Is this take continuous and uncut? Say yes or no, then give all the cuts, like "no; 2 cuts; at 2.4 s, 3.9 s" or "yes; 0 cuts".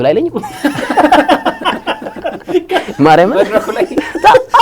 yes; 0 cuts